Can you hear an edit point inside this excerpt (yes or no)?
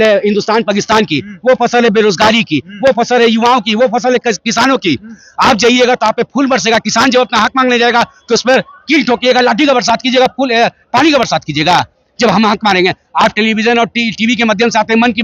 no